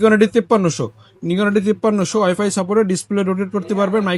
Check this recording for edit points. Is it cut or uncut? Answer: uncut